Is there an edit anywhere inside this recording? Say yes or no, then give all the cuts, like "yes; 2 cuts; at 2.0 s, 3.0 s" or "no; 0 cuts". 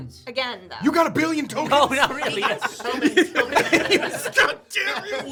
no; 0 cuts